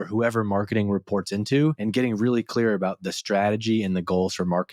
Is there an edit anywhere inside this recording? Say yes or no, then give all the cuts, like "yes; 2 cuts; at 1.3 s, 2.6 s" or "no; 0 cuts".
yes; 1 cut; at 1.8 s